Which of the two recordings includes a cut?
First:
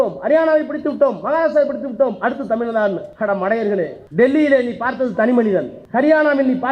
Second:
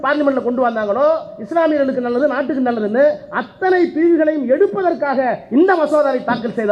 first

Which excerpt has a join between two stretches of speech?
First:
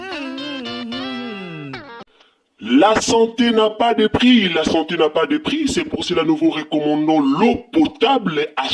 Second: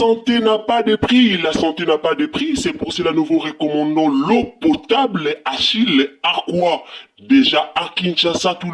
first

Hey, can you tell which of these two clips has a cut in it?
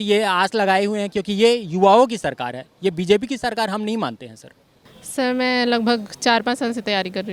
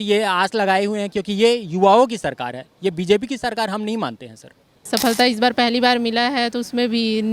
second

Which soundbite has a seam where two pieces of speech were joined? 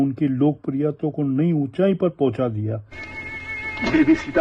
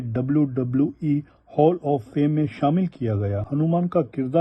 second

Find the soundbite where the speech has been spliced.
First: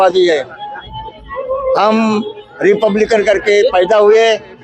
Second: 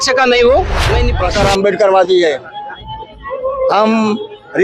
second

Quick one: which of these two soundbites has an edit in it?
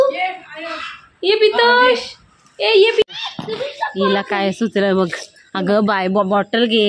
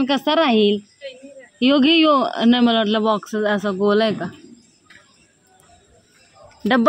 first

